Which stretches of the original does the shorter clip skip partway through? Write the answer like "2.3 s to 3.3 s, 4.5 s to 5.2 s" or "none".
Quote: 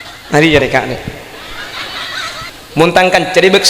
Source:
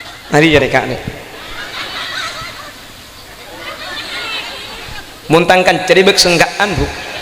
2.5 s to 5.0 s